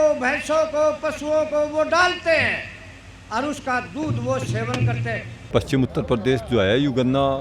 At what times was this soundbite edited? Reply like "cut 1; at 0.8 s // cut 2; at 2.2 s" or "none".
cut 1; at 5.3 s

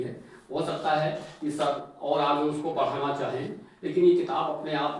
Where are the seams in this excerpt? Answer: none

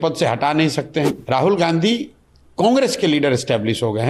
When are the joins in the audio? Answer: cut 1; at 1.1 s

